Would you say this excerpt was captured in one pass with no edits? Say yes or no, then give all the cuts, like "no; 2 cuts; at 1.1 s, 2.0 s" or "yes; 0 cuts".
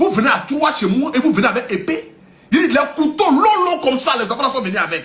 yes; 0 cuts